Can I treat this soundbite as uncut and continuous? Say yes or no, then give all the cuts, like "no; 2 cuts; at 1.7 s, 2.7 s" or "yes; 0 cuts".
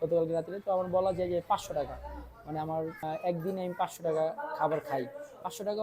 no; 1 cut; at 3.0 s